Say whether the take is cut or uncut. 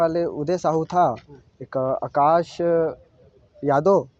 uncut